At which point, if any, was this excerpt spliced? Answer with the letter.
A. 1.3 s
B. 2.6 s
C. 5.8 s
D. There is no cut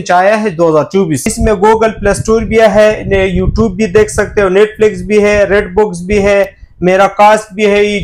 A